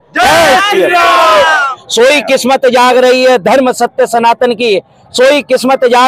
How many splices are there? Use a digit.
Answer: 1